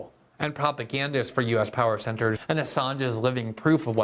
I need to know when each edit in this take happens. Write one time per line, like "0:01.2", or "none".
0:02.4